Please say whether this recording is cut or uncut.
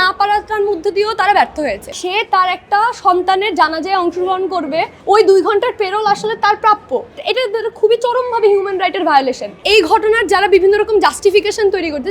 cut